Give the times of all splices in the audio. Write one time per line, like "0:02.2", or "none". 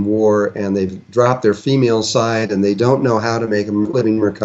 0:02.9

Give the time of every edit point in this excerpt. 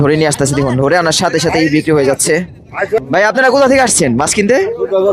0:03.0

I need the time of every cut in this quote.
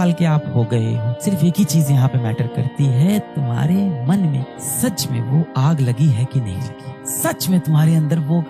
0:01.1

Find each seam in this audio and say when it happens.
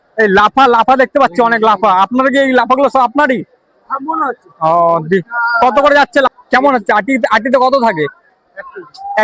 0:06.3

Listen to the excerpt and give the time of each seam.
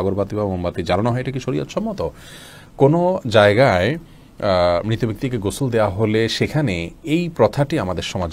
none

